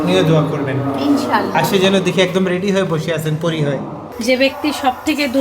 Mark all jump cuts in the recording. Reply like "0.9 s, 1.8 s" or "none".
4.0 s